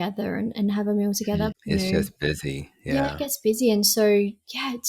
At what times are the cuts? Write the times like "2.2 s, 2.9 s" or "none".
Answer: 1.5 s